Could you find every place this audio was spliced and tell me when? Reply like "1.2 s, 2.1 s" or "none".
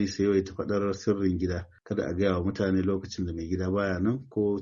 none